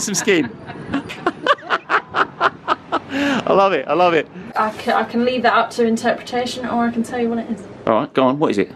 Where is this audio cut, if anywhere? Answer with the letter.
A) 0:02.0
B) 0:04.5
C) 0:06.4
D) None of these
B